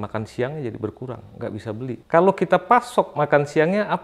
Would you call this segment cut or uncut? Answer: cut